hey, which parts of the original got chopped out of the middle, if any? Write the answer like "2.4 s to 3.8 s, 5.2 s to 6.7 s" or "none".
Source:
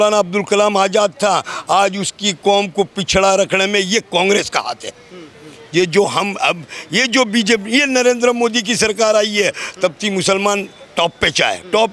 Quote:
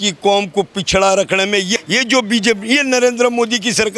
4.0 s to 6.8 s